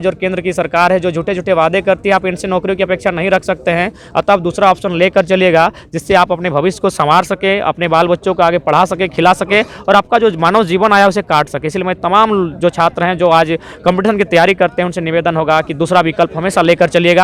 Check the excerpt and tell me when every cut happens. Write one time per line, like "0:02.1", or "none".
none